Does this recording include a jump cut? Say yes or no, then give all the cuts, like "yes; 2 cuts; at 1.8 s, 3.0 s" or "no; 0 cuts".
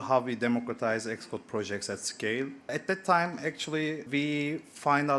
yes; 2 cuts; at 2.7 s, 4.0 s